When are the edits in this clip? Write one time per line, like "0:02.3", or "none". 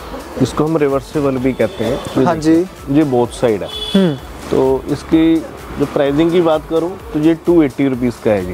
none